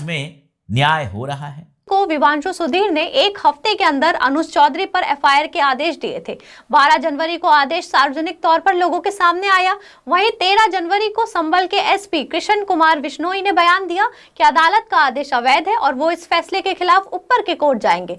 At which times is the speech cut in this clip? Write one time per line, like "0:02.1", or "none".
0:01.9

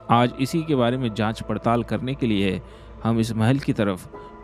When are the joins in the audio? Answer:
none

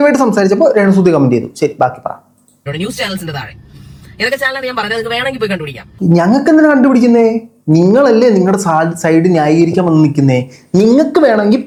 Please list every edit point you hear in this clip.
none

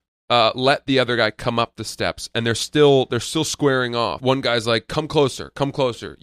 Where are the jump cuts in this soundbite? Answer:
0:04.2

